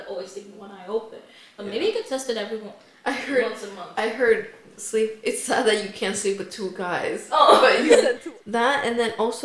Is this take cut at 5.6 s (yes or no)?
no